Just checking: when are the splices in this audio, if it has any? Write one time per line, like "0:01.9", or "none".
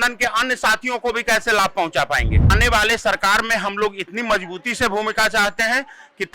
0:02.5